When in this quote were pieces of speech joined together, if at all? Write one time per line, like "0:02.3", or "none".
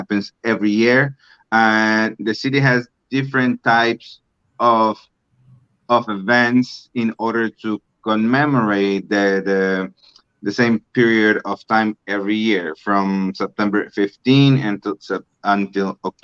none